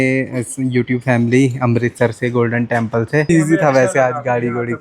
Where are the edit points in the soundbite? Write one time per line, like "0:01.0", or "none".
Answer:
0:03.3